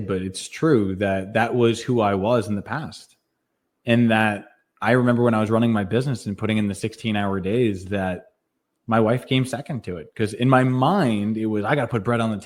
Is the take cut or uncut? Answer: uncut